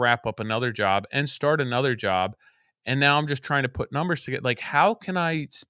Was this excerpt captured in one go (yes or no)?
yes